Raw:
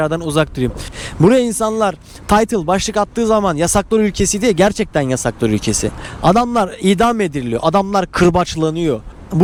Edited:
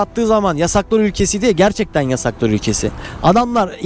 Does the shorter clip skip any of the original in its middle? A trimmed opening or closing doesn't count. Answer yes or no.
no